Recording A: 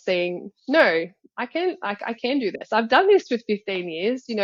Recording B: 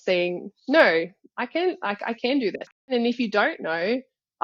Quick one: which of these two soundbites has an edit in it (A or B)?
B